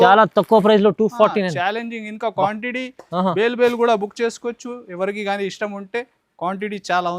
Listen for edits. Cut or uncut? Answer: uncut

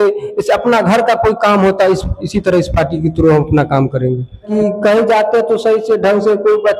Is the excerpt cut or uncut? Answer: cut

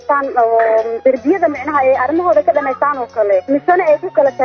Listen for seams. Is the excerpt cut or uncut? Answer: cut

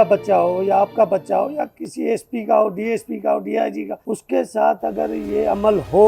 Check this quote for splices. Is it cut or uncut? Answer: cut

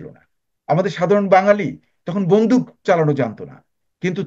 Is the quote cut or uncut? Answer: uncut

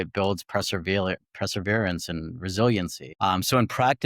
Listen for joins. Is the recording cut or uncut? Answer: cut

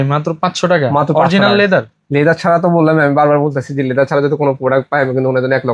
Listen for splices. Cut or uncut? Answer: uncut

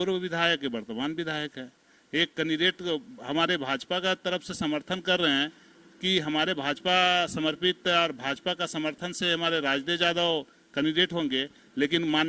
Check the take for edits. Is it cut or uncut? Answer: uncut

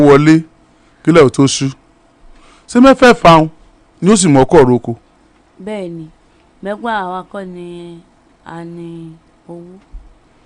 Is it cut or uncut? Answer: cut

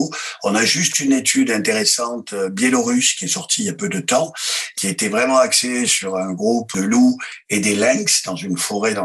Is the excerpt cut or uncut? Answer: uncut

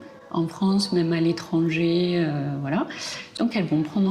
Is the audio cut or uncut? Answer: cut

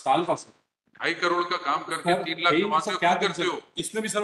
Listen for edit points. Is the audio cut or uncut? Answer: uncut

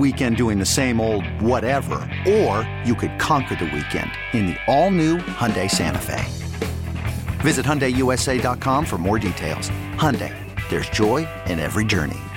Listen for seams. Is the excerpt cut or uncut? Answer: uncut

